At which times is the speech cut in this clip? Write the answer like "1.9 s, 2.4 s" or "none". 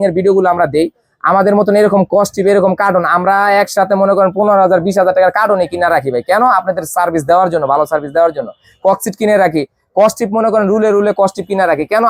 none